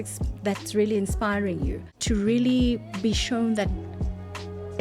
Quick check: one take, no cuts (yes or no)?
no